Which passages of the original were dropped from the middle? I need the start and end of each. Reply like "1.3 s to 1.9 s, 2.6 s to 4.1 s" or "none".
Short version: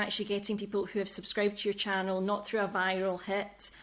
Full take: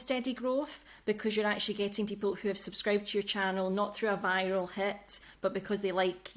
none